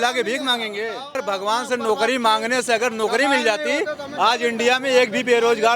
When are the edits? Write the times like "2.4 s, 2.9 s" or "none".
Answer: 1.2 s